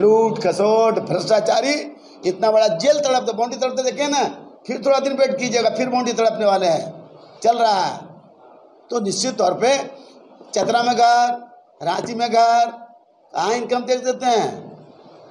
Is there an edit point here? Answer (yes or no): no